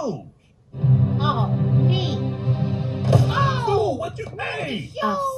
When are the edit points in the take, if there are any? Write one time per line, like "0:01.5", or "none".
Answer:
0:02.5